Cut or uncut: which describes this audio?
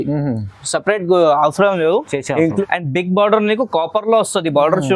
cut